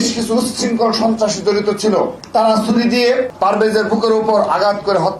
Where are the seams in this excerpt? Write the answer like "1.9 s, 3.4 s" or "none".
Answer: 2.2 s, 3.3 s